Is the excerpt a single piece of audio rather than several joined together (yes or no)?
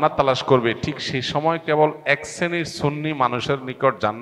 yes